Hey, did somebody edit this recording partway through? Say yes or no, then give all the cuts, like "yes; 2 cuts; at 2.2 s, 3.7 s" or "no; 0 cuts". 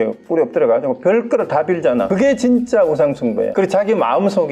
yes; 2 cuts; at 2.1 s, 3.5 s